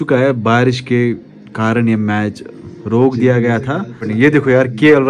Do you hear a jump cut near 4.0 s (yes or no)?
yes